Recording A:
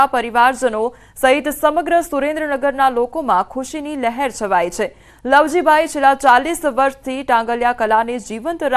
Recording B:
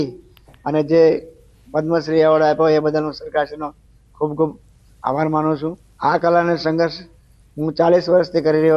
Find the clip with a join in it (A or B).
A